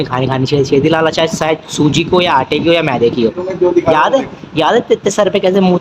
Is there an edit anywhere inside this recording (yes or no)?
yes